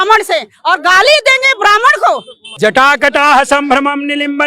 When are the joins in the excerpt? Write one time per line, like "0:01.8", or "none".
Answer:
0:02.5